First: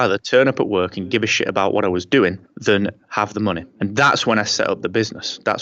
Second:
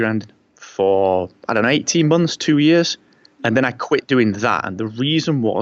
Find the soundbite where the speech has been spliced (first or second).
first